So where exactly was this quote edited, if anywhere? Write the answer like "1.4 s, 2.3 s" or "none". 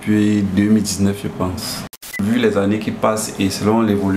2.1 s

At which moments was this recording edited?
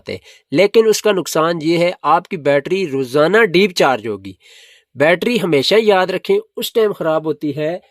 none

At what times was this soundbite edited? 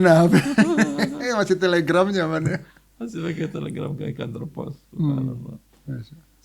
none

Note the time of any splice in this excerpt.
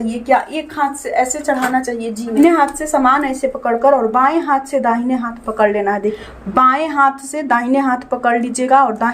2.3 s, 6.2 s

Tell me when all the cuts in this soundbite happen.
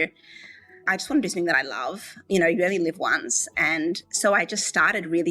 0.9 s, 2.2 s

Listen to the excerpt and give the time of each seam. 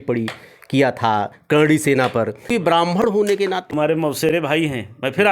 2.4 s, 3.7 s

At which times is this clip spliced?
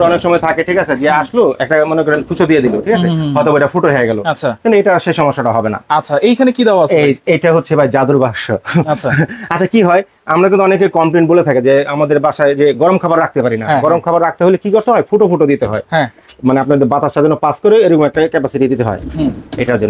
none

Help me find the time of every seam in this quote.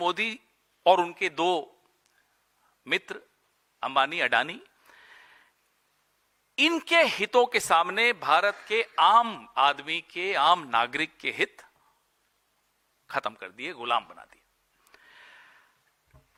none

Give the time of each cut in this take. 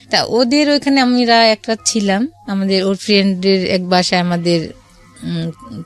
none

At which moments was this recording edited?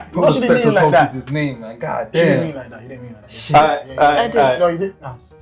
none

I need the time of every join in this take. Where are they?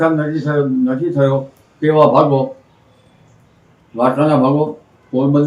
none

